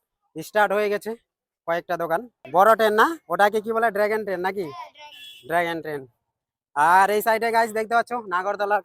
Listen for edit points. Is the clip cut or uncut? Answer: cut